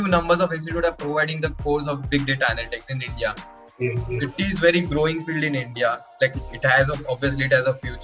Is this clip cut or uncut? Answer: uncut